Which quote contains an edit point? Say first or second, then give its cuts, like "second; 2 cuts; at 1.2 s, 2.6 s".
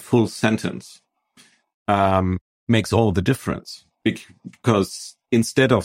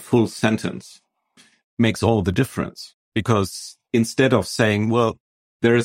second; 2 cuts; at 1.6 s, 2.9 s